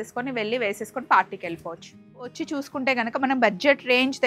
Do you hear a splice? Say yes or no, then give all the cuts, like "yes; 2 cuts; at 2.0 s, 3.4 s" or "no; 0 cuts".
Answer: yes; 1 cut; at 2.4 s